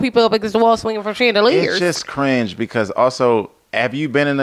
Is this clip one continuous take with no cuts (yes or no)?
yes